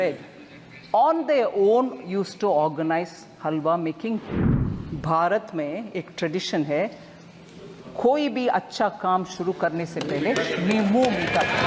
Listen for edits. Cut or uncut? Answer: cut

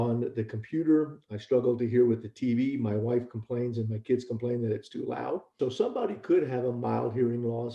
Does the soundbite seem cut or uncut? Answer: cut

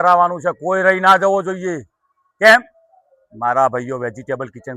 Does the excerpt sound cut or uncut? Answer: uncut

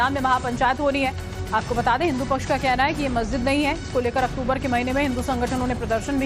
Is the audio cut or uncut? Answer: cut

